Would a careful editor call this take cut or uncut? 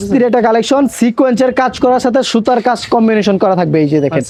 uncut